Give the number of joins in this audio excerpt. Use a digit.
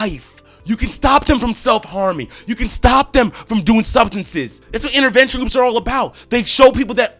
0